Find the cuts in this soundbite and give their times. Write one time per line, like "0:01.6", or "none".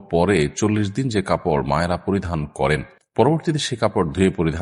0:03.0